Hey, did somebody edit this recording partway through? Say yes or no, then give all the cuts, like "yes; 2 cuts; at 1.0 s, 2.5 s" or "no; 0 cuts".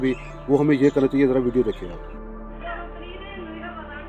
no; 0 cuts